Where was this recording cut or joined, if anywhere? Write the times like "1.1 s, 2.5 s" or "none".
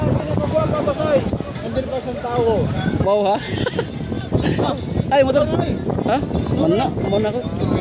none